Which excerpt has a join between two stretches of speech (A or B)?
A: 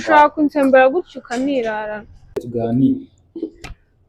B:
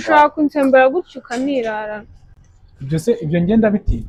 A